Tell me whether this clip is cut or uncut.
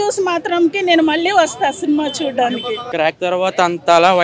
cut